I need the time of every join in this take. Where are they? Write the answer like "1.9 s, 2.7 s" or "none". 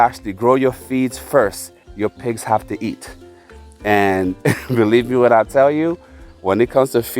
1.8 s